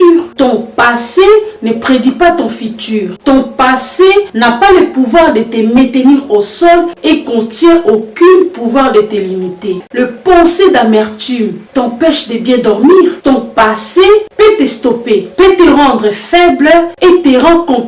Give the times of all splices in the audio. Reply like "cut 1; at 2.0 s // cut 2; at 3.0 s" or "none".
cut 1; at 9.8 s // cut 2; at 13.2 s

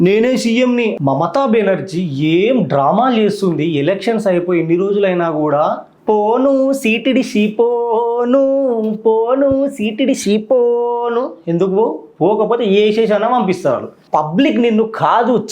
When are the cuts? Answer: cut 1; at 1.0 s // cut 2; at 5.9 s // cut 3; at 13.9 s

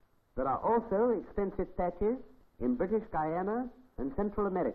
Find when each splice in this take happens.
cut 1; at 1.7 s

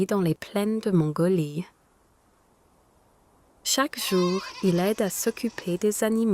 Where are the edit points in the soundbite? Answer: cut 1; at 3.6 s

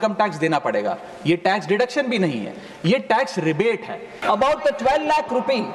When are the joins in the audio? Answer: cut 1; at 4.2 s

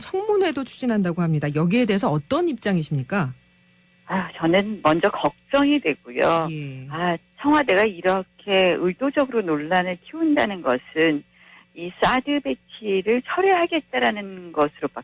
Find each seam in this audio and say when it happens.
none

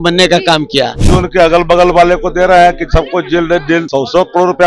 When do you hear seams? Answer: cut 1; at 1.1 s // cut 2; at 3.9 s

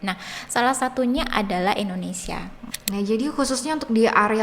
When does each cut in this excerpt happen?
cut 1; at 2.6 s

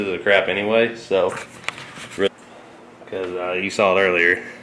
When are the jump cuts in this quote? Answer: cut 1; at 2.3 s

